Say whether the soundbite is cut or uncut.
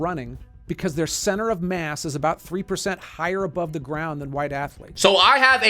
uncut